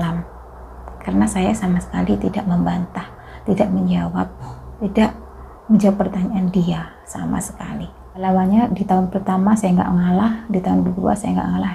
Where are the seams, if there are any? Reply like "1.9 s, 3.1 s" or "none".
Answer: 8.1 s